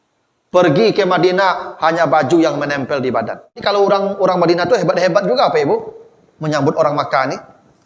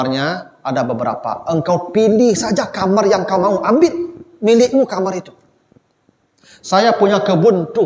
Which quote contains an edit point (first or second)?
first